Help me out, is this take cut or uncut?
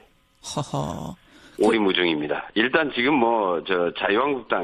cut